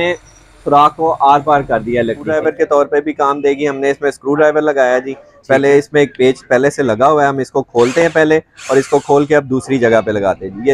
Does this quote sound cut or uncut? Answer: cut